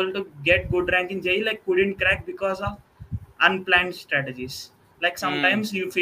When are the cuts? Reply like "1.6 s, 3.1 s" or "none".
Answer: none